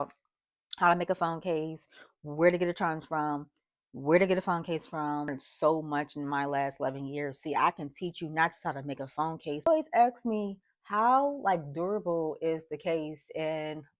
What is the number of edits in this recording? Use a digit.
2